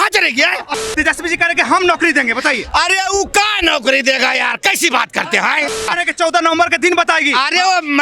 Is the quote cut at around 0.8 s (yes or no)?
yes